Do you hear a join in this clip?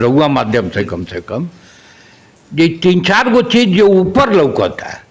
no; 0 cuts

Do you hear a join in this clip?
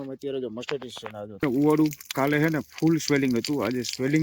yes; 1 cut; at 1.4 s

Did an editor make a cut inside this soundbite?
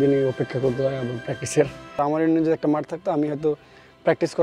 yes; 1 cut; at 1.8 s

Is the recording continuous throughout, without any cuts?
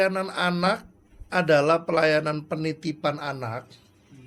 yes; 0 cuts

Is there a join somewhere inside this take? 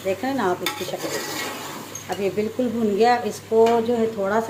no; 0 cuts

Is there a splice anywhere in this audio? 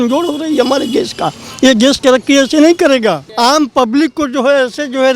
yes; 1 cut; at 3.3 s

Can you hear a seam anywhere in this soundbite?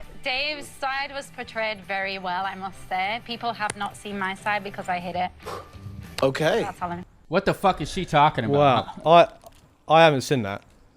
yes; 1 cut; at 7.1 s

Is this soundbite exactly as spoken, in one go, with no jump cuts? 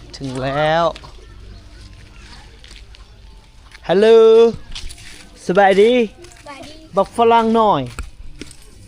yes; 0 cuts

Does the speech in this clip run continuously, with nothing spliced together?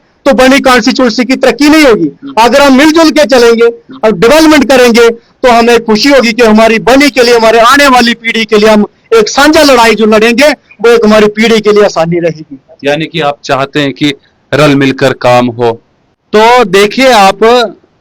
yes; 0 cuts

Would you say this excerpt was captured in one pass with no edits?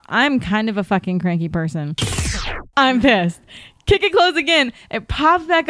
no; 1 cut; at 2.4 s

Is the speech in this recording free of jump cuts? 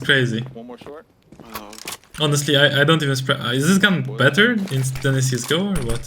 yes; 0 cuts

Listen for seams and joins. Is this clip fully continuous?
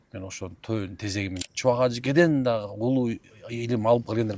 no; 1 cut; at 1.4 s

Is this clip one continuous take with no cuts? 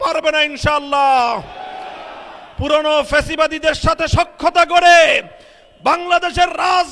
yes; 0 cuts

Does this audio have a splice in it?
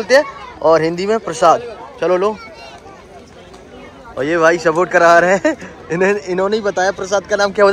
no; 0 cuts

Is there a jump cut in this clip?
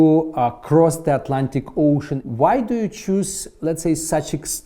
yes; 1 cut; at 2.2 s

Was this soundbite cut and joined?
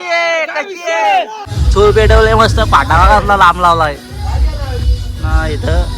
yes; 1 cut; at 1.5 s

